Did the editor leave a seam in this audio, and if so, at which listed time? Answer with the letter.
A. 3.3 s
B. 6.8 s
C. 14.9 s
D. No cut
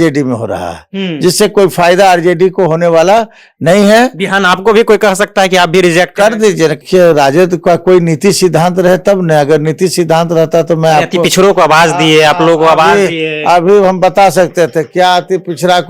B